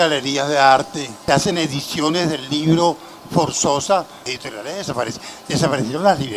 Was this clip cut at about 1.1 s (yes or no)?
yes